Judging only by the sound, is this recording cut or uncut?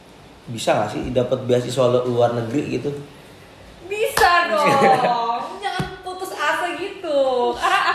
uncut